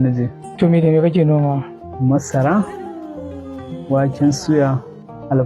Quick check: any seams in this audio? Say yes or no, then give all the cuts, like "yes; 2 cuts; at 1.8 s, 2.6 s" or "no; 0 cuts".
no; 0 cuts